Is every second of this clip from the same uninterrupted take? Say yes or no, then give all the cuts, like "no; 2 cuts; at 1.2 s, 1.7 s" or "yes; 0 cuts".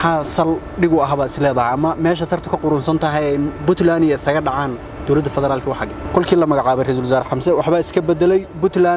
no; 1 cut; at 5.9 s